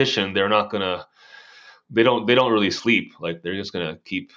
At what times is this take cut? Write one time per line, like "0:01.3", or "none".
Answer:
none